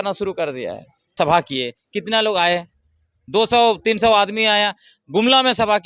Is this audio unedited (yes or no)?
no